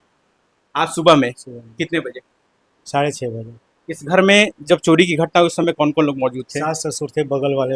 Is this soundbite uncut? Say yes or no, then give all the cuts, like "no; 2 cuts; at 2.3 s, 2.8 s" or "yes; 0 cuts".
yes; 0 cuts